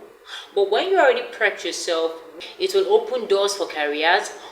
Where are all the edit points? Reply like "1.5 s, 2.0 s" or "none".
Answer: 2.3 s